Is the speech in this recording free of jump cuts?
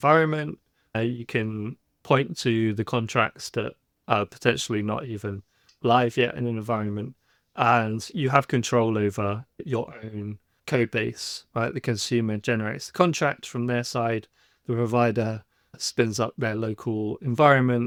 yes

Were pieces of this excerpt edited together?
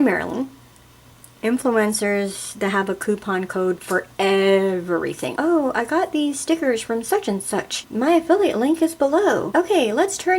yes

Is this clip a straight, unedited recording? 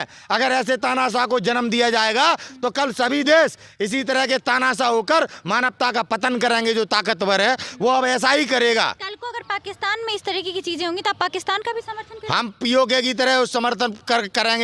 yes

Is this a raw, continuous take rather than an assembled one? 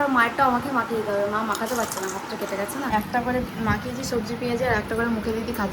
yes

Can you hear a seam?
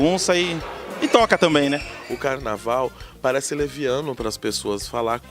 yes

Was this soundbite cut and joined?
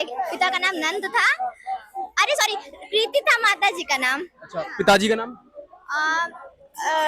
no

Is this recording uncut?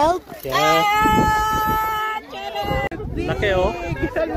no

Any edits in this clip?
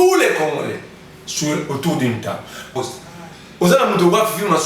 yes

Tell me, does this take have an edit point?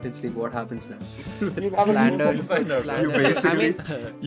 no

